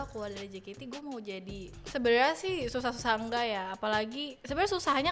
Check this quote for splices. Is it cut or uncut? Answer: cut